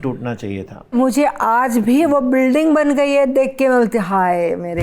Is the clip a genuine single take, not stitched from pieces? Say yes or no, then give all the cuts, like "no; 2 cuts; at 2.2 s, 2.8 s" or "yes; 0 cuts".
no; 1 cut; at 0.9 s